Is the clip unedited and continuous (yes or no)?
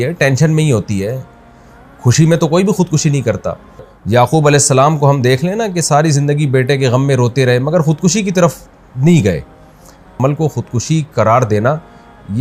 no